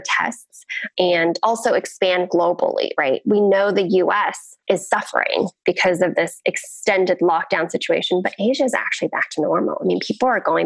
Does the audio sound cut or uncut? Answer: cut